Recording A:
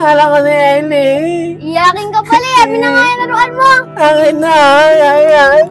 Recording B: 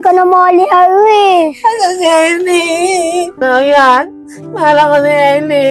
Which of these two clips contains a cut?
B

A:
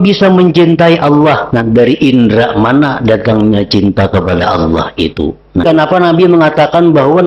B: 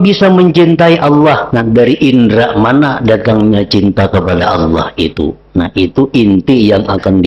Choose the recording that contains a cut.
A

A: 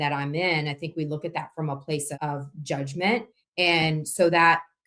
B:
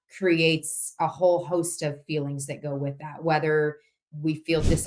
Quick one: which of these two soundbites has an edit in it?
A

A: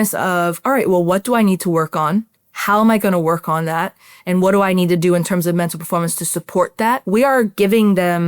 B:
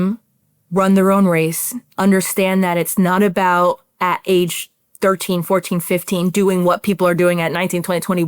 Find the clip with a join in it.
A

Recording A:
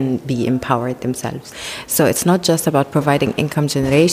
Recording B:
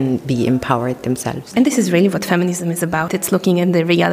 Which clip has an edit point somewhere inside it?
B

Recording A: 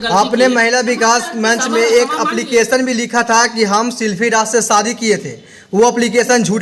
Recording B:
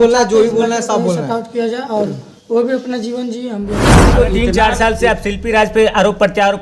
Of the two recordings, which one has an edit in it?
B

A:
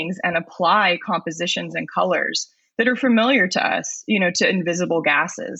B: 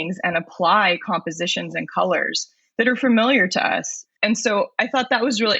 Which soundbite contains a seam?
B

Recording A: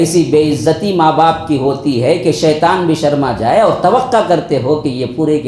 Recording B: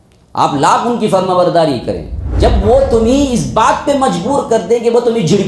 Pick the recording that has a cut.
B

